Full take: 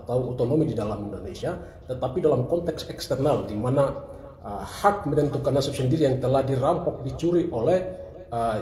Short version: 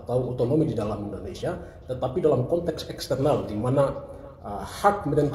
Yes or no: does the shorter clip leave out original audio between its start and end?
no